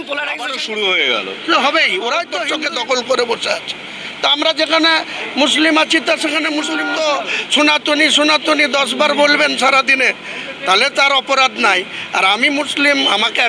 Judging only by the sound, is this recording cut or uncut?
cut